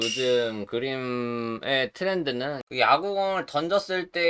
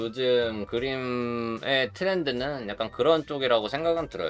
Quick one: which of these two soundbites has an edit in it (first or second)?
first